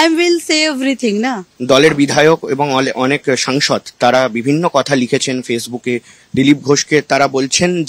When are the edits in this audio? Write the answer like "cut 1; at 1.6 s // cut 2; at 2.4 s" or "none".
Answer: cut 1; at 1.5 s